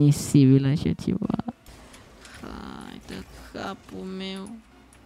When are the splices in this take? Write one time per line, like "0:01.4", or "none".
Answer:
0:01.7